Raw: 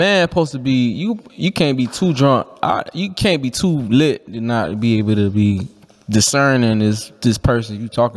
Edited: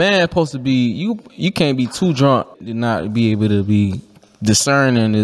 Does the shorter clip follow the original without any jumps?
no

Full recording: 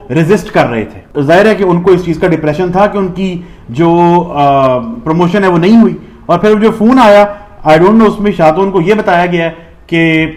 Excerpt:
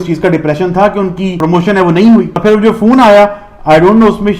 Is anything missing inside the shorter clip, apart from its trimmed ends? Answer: yes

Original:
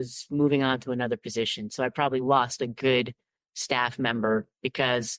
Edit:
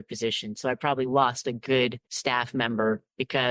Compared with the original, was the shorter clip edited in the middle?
yes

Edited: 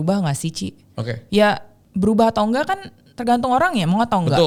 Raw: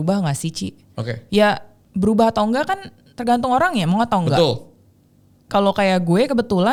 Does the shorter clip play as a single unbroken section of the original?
yes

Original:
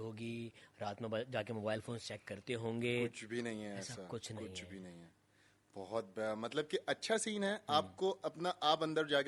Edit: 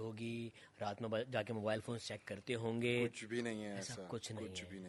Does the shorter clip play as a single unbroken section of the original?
yes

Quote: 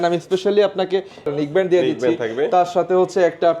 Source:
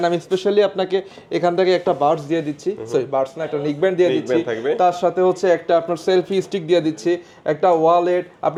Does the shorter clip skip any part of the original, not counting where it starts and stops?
yes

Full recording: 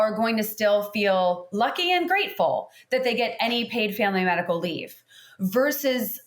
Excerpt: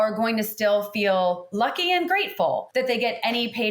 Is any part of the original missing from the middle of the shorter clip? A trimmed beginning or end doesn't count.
yes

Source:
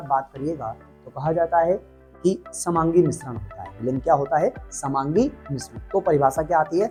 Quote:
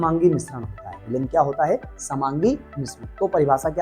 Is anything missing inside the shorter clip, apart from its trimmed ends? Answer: no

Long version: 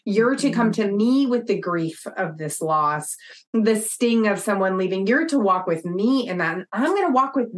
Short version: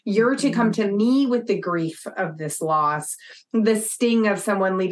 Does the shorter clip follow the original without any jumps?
yes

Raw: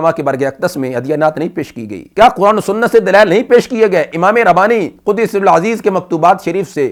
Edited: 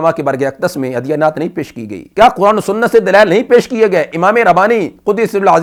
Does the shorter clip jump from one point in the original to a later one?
no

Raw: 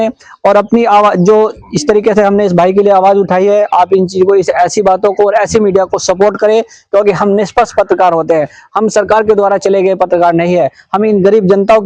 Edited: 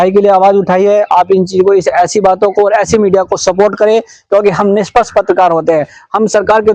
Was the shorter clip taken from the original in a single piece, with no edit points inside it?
yes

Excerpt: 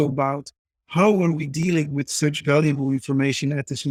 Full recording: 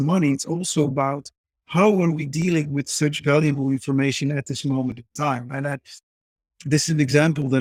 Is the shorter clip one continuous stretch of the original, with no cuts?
yes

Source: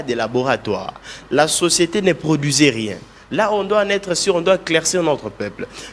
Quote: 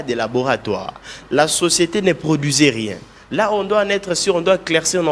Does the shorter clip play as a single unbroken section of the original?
yes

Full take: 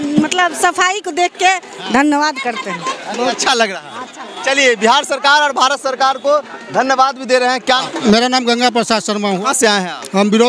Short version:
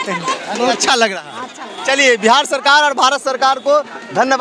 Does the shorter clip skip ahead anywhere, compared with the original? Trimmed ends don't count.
no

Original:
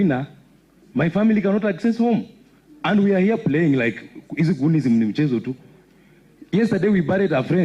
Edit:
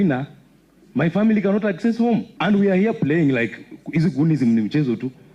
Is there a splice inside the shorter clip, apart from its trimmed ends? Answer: yes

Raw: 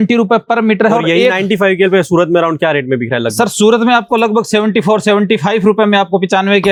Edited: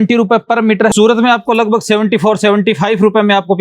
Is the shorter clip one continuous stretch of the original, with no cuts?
no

